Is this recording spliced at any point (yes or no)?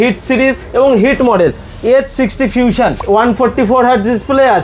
yes